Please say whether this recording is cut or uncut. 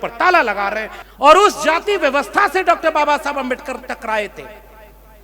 cut